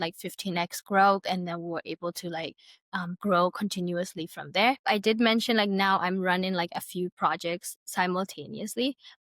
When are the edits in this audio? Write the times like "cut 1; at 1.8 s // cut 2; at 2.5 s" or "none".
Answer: cut 1; at 4.8 s